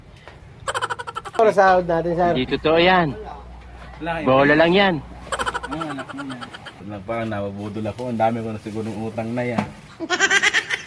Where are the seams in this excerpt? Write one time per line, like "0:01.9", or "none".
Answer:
0:01.4
0:06.8